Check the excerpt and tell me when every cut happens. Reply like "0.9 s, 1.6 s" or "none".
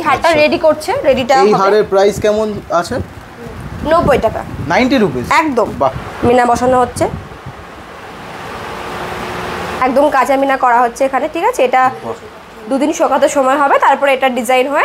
6.1 s, 9.8 s